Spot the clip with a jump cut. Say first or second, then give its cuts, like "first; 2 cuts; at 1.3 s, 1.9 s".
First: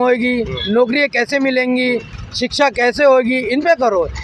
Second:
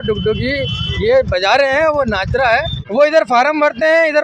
second; 1 cut; at 2.8 s